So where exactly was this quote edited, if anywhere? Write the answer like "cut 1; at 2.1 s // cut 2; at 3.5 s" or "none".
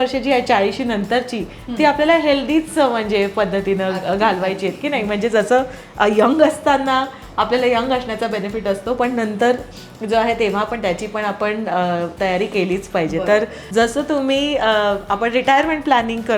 cut 1; at 13.6 s